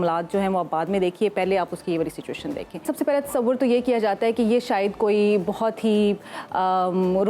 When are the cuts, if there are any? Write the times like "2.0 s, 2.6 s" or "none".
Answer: 2.9 s